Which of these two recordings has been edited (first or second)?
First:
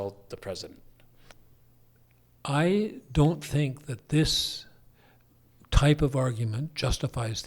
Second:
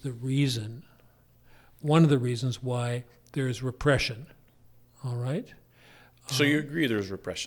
first